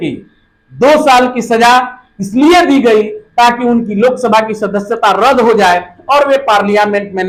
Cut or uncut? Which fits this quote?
uncut